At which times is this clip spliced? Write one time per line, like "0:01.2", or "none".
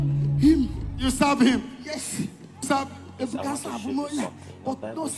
0:02.6